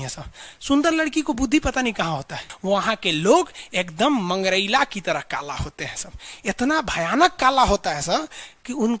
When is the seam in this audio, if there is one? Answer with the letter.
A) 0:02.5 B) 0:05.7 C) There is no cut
A